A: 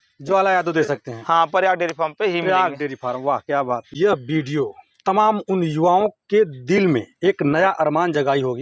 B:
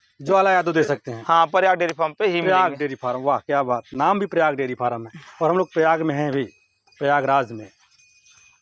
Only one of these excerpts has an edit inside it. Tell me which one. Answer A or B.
A